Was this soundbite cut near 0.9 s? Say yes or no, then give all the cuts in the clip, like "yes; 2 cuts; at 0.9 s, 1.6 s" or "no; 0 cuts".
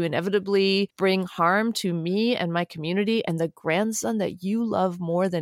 yes; 1 cut; at 0.9 s